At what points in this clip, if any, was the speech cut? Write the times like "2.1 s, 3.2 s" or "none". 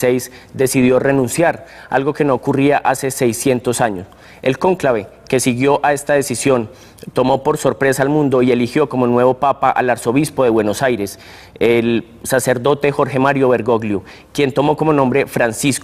1.7 s